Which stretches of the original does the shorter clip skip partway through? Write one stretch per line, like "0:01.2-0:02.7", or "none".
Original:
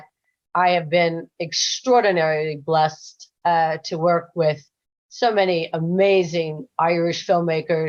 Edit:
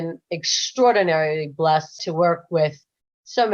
0:03.1-0:03.9